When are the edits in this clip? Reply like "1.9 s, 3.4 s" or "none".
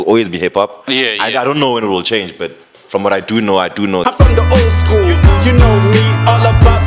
4.0 s